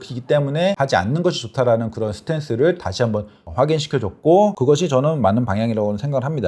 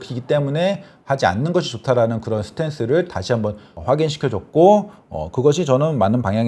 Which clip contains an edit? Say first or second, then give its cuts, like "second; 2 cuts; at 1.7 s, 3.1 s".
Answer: first; 2 cuts; at 0.8 s, 4.6 s